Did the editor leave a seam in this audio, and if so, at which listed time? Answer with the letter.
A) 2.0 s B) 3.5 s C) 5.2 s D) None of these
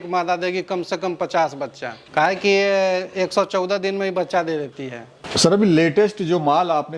D